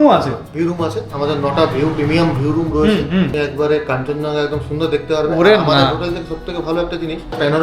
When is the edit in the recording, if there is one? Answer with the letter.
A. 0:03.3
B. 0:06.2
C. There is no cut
A